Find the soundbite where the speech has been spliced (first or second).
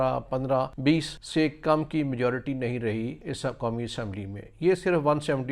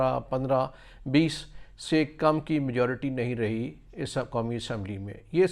first